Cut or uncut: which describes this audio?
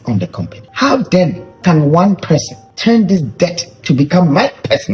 uncut